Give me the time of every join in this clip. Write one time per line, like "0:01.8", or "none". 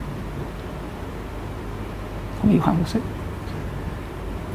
none